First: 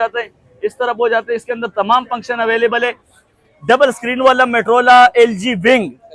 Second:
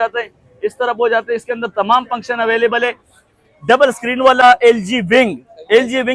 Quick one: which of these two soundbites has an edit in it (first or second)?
second